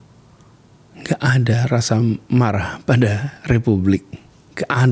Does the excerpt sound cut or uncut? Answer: uncut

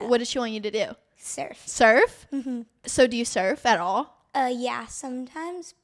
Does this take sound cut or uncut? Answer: uncut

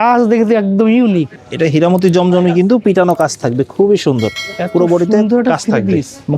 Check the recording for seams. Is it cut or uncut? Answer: cut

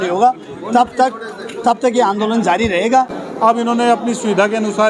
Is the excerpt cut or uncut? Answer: cut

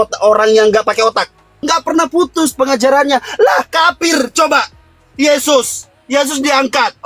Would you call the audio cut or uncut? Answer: cut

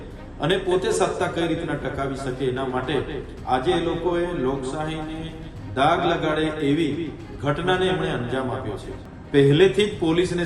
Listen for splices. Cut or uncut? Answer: cut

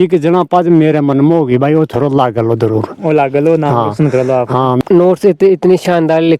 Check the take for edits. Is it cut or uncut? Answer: cut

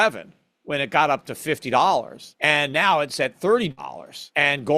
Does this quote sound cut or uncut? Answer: cut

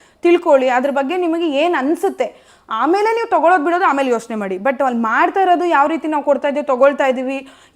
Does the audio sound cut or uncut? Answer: uncut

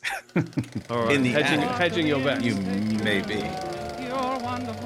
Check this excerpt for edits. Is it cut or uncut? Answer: cut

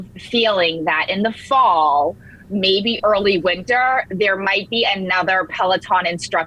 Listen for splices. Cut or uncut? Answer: uncut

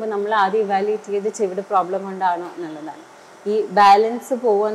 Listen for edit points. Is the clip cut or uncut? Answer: uncut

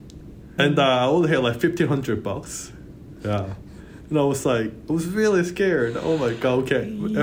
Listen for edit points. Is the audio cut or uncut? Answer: uncut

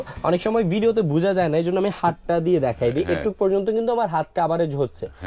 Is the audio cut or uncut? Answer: uncut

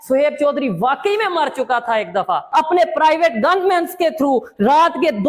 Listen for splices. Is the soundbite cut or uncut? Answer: cut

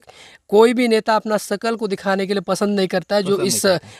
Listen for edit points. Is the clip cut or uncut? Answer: uncut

